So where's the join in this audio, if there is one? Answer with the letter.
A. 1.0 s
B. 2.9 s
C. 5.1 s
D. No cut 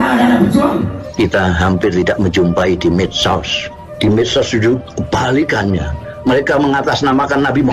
A